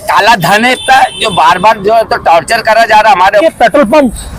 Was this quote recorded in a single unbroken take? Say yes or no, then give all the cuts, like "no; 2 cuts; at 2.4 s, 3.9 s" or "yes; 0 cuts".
no; 1 cut; at 3.4 s